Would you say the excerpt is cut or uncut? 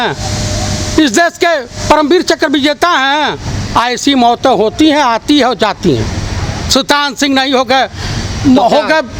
uncut